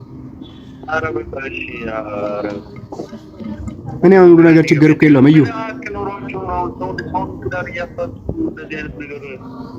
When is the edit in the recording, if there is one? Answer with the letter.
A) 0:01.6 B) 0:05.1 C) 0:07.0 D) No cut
D